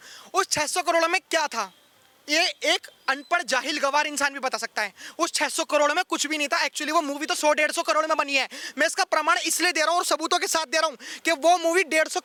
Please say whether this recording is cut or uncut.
uncut